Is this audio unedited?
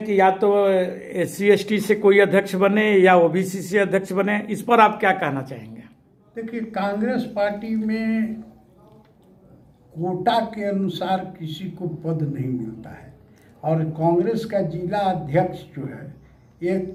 yes; 0 cuts

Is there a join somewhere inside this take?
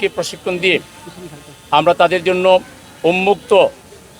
no; 0 cuts

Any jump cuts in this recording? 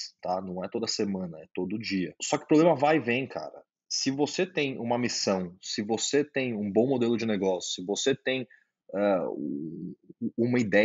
yes; 1 cut; at 2.2 s

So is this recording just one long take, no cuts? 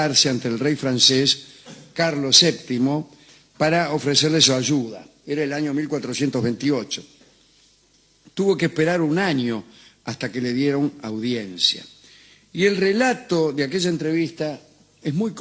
no; 1 cut; at 2.6 s

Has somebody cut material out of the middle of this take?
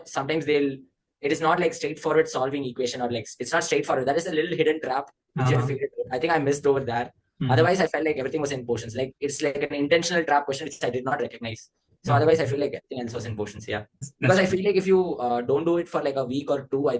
yes; 1 cut; at 14.1 s

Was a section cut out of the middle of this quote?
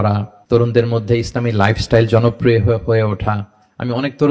no; 0 cuts

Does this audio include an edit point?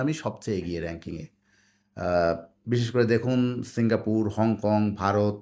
no; 0 cuts

